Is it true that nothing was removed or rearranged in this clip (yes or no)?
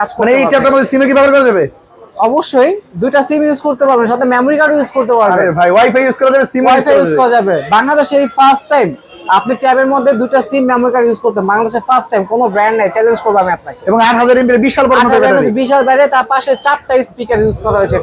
yes